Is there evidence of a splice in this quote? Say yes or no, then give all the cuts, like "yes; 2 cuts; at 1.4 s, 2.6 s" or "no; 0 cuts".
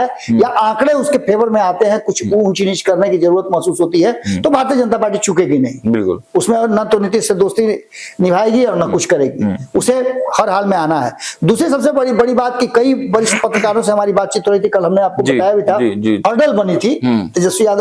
yes; 1 cut; at 16.2 s